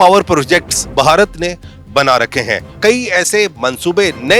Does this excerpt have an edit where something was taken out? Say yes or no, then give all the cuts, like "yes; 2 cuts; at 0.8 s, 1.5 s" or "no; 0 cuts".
no; 0 cuts